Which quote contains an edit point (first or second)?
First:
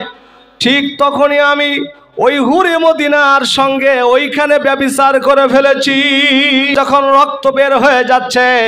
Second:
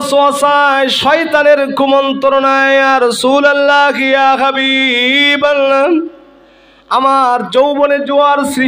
first